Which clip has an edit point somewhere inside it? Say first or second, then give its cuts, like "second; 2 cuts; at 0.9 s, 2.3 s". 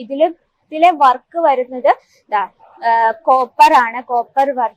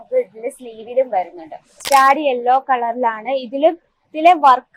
second; 1 cut; at 1.8 s